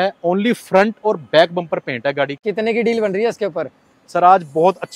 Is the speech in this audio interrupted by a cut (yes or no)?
yes